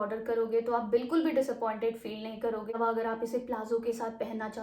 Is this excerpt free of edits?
no; 1 cut; at 2.7 s

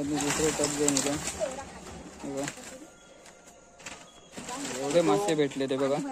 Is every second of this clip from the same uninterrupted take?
yes; 0 cuts

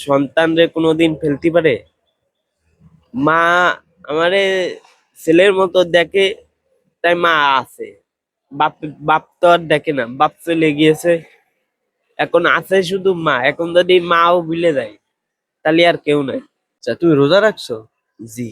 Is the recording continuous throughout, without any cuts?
no; 1 cut; at 16.9 s

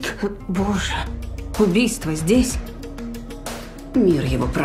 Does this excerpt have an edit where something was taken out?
no; 0 cuts

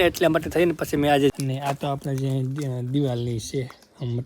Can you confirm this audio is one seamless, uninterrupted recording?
no; 1 cut; at 1.3 s

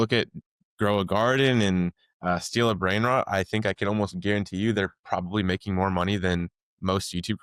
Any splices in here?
no; 0 cuts

